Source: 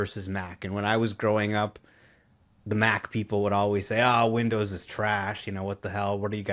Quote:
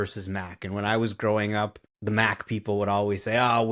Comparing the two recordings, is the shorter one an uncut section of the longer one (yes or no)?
no